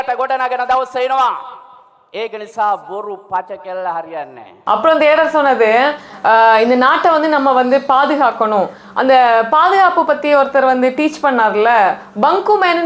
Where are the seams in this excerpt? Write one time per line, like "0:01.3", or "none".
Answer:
0:04.6